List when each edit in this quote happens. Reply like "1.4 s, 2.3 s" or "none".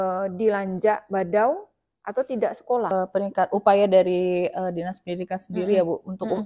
2.9 s